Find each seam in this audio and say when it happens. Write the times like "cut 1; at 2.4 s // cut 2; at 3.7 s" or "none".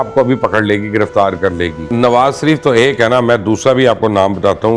cut 1; at 1.9 s